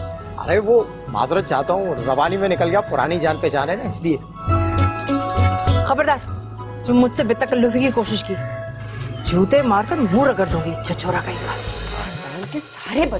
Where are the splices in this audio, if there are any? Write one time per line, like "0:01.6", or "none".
0:11.8

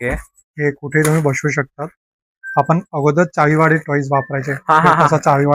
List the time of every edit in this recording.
none

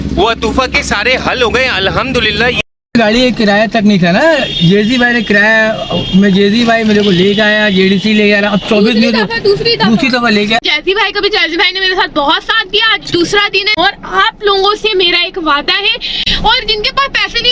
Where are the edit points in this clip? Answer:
0:02.6
0:10.6
0:16.2

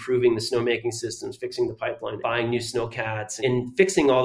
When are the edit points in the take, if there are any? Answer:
0:02.2
0:03.3

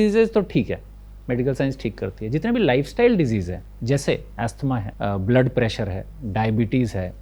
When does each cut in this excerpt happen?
0:04.9

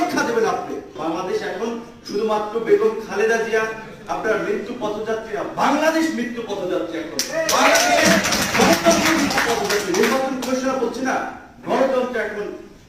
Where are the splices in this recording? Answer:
0:00.9

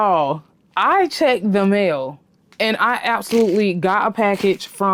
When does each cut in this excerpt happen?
none

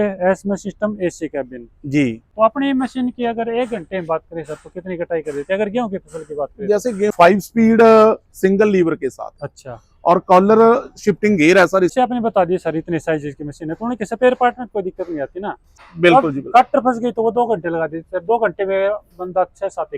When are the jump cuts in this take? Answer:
0:02.2
0:07.1
0:11.9
0:15.7

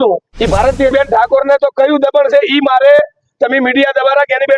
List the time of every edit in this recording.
0:00.9

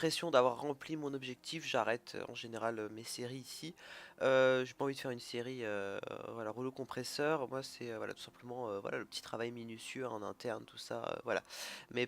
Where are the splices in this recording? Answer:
0:08.4

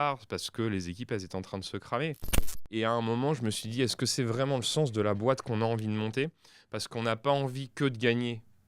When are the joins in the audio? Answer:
0:02.6

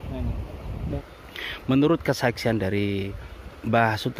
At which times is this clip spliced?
0:01.0

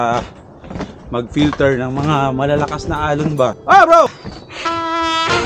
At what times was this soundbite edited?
0:03.6

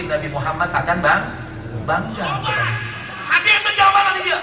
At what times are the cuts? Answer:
0:02.9

